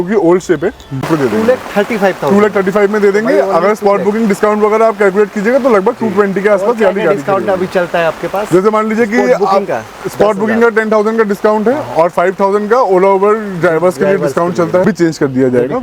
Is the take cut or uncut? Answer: cut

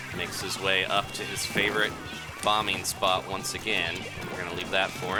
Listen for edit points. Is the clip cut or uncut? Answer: uncut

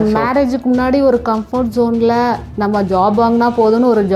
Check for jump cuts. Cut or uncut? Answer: uncut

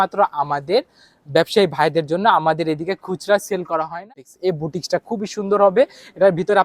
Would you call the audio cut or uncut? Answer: cut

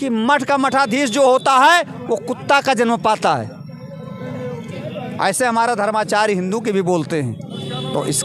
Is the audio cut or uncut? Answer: uncut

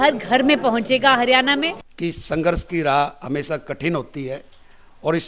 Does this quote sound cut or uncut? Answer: cut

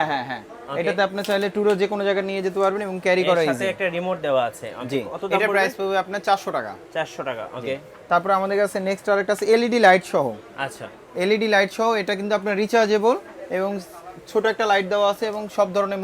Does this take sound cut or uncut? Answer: uncut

